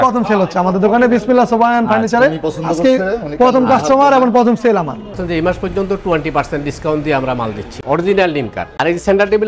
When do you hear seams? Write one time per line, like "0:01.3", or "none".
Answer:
0:05.2
0:07.8

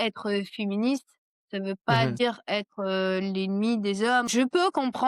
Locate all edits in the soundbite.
0:02.1
0:04.3

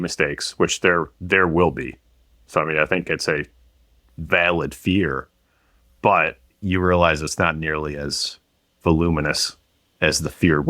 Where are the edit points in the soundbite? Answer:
none

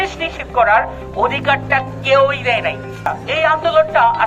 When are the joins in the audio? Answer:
0:03.1

